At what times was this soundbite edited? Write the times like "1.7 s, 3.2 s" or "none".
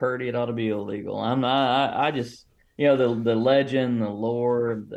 2.6 s